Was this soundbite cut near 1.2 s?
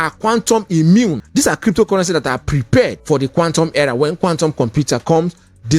yes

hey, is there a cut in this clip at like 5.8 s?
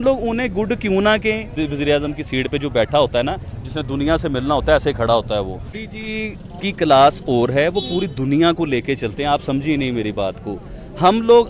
yes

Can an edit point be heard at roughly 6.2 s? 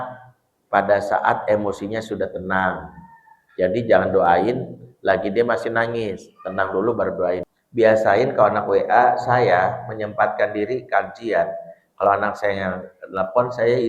no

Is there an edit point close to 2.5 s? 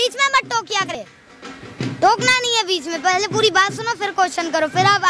no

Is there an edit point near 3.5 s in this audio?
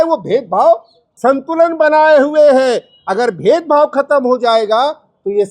no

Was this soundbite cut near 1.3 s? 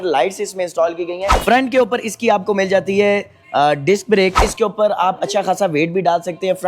yes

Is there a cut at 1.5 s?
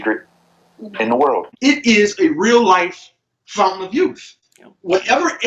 yes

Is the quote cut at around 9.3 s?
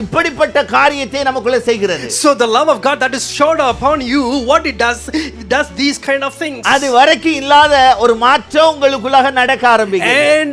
no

